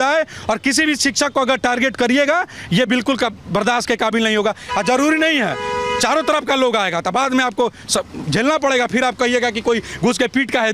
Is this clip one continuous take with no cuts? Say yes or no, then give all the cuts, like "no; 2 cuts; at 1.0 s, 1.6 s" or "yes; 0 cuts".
yes; 0 cuts